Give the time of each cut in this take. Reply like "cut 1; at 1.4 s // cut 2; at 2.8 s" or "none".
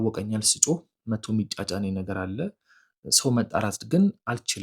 none

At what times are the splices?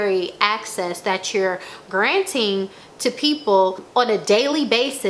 cut 1; at 3.8 s

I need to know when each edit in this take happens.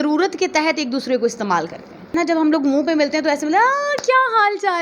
cut 1; at 2.1 s

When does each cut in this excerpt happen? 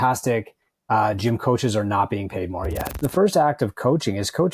cut 1; at 3.0 s

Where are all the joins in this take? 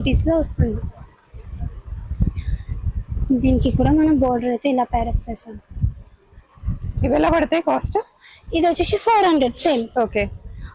none

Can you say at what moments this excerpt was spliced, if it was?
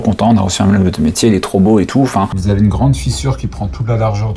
none

